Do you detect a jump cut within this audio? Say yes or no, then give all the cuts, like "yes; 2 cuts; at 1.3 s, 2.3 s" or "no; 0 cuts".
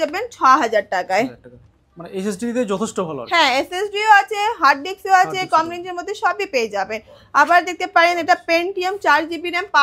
no; 0 cuts